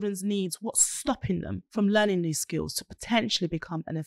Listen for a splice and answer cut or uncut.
cut